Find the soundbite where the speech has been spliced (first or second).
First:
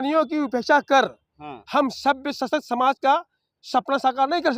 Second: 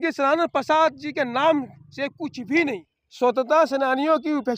second